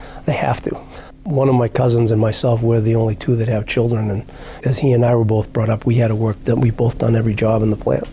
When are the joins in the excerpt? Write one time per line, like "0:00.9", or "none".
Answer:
none